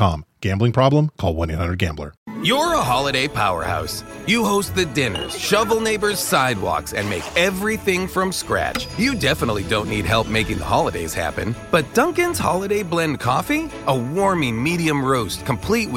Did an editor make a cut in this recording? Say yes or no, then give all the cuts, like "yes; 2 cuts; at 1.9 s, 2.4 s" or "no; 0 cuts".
yes; 1 cut; at 2.1 s